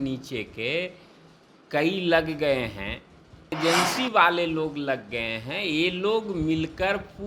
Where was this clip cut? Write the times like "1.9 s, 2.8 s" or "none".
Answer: 3.6 s